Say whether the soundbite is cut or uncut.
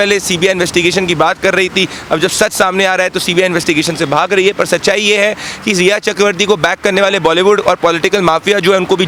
uncut